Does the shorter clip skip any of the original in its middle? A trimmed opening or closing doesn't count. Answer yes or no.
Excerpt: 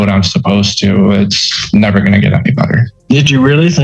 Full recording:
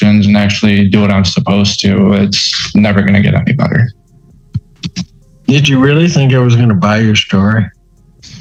yes